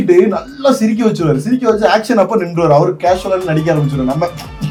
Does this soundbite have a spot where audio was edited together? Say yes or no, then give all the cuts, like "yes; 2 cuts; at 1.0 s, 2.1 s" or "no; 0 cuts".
no; 0 cuts